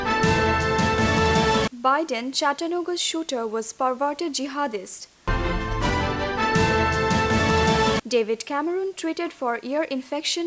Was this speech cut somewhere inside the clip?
yes; 1 cut; at 1.6 s

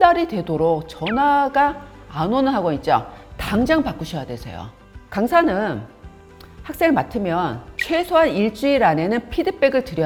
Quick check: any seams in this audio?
no; 0 cuts

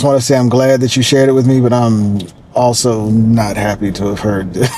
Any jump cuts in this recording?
no; 0 cuts

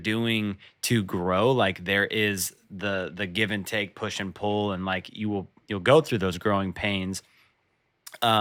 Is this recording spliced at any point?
no; 0 cuts

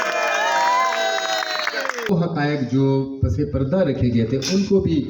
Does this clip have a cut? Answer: yes; 1 cut; at 2.1 s

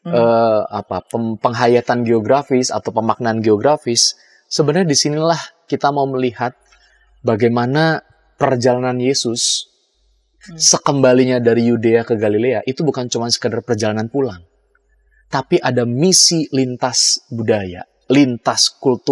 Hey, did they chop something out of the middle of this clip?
no; 0 cuts

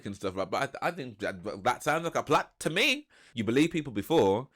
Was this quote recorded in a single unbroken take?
no; 1 cut; at 3.2 s

